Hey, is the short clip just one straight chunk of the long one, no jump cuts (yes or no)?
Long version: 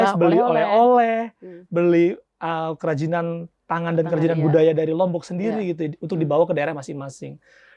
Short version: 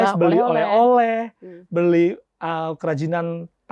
yes